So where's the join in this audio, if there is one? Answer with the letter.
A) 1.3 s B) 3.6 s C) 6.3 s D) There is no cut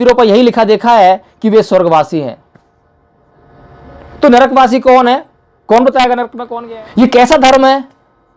C